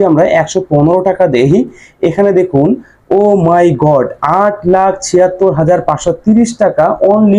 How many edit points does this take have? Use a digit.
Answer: 0